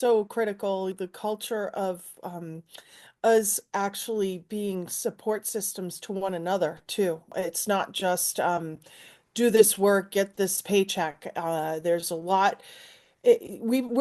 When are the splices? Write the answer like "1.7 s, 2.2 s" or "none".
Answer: 1.0 s, 7.3 s